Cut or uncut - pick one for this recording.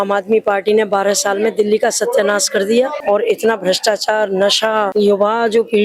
uncut